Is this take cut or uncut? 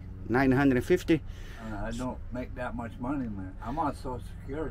uncut